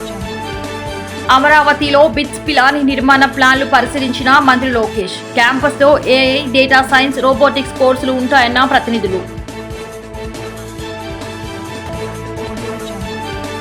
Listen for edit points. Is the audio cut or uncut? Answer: cut